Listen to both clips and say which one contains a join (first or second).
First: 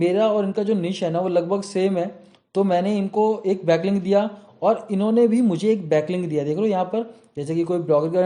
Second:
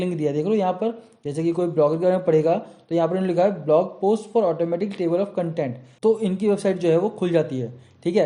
second